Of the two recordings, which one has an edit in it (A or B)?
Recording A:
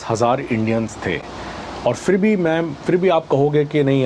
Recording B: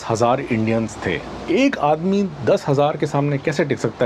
B